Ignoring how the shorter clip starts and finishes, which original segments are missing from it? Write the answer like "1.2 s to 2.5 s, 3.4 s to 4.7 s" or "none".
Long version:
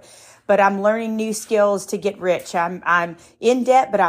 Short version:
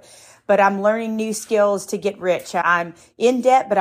2.6 s to 2.8 s